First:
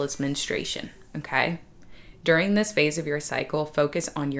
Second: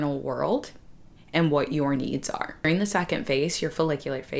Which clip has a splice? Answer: second; 1 cut; at 2.6 s

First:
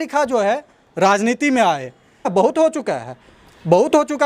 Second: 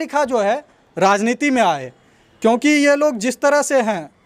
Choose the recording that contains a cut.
first; 1 cut; at 2.3 s

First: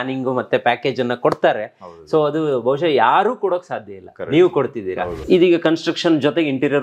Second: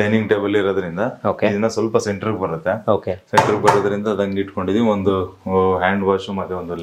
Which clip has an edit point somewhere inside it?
first; 1 cut; at 5.2 s

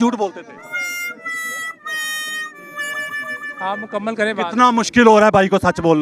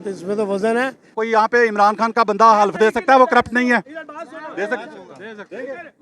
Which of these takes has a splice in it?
second; 1 cut; at 1.2 s

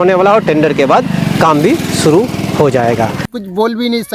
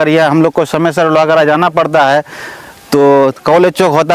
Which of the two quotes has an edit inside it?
first; 1 cut; at 3.2 s

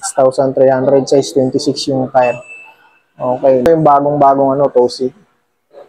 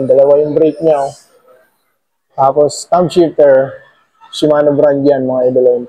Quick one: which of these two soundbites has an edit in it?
first; 1 cut; at 3.7 s

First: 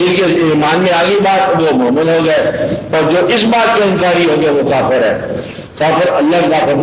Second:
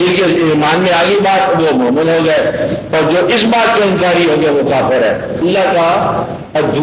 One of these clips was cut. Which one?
second; 1 cut; at 5.4 s

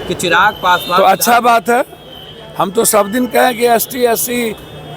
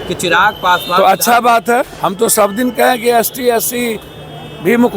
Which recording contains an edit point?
second; 1 cut; at 1.9 s

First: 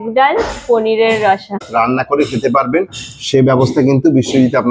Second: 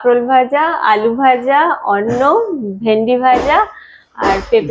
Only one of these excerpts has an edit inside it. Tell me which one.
first; 1 cut; at 1.7 s

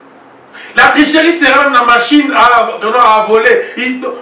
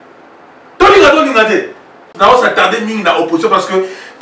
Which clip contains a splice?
second; 1 cut; at 2.1 s

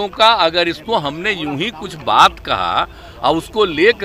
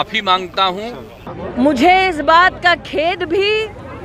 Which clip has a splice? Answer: second; 1 cut; at 1.3 s

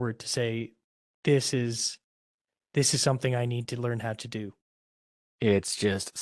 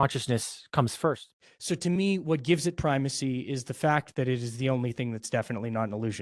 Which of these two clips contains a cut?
second; 1 cut; at 1.3 s

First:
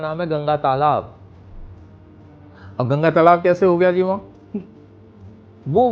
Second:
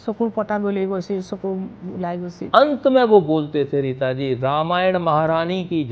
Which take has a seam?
second; 1 cut; at 2.4 s

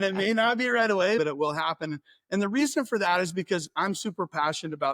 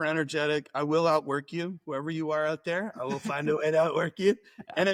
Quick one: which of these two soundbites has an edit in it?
first; 1 cut; at 1.2 s

